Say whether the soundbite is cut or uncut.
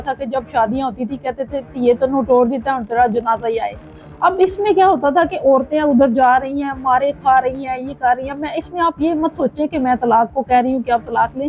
uncut